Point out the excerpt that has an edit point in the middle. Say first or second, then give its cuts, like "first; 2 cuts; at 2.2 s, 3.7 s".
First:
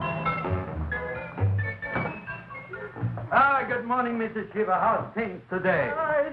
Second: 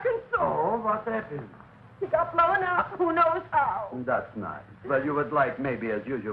first; 1 cut; at 3.4 s